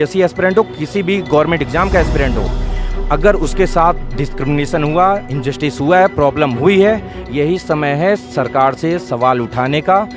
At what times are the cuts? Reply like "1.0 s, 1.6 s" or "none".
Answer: none